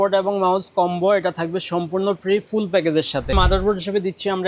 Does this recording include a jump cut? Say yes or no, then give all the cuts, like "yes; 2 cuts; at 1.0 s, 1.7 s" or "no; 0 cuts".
yes; 1 cut; at 3.3 s